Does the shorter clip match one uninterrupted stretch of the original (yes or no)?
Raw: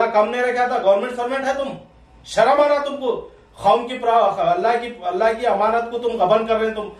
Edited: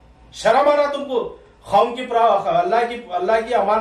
yes